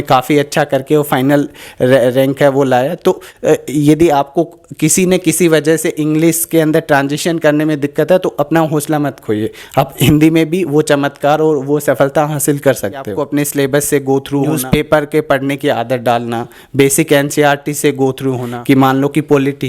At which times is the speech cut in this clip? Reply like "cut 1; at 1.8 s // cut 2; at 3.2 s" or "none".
cut 1; at 13.2 s // cut 2; at 14.6 s // cut 3; at 18.5 s